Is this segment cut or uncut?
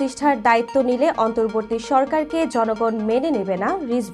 uncut